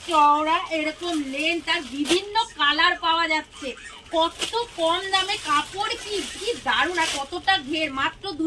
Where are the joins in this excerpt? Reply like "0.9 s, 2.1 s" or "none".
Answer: none

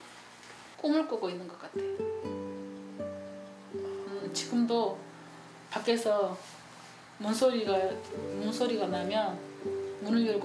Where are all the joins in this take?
none

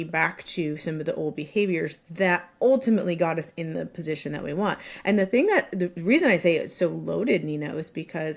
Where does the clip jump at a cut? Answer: none

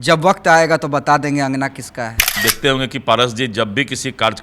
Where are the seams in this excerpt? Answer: 2.5 s

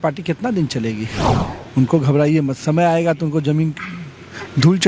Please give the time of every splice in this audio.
1.4 s

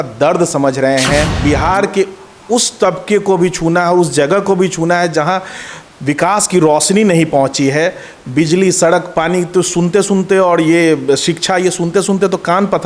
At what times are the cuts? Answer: 1.3 s

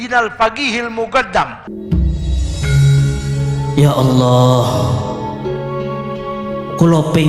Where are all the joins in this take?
1.7 s

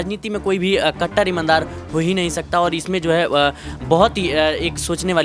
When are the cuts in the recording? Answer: none

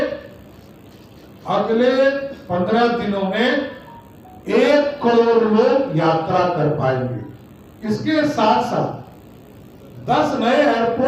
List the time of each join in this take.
none

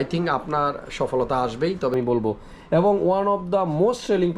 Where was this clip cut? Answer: 1.9 s

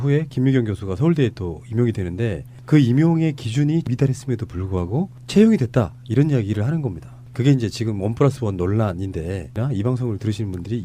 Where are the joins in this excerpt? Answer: 4.6 s

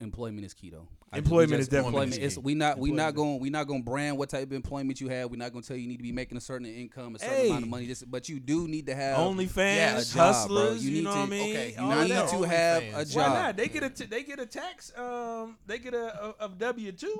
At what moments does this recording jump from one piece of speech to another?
none

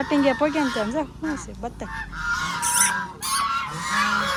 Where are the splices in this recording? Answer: none

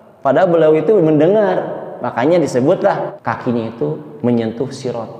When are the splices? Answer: 3.1 s

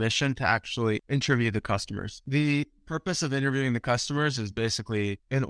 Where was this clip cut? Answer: 1.0 s, 2.2 s

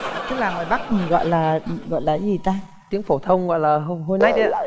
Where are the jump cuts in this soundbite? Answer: none

